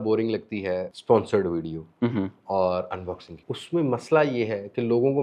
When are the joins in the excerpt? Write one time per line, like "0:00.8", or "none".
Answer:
0:00.9
0:03.4